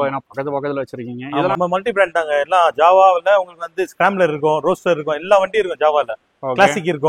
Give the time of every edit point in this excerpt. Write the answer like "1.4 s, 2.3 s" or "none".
1.6 s